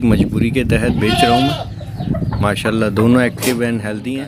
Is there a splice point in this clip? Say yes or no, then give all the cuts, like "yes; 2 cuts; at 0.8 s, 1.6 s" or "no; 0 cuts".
no; 0 cuts